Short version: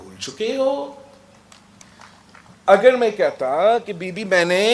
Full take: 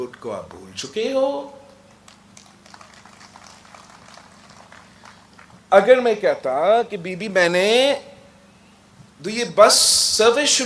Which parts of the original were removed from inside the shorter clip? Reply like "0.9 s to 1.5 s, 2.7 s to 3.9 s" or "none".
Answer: 2.4 s to 4.9 s